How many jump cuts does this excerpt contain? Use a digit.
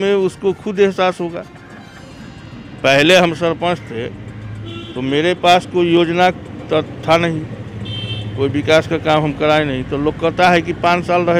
0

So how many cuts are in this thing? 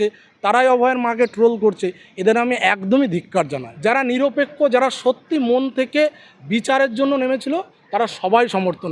1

